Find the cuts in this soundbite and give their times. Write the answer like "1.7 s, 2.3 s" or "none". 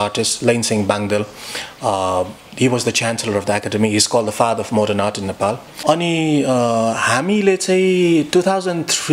5.7 s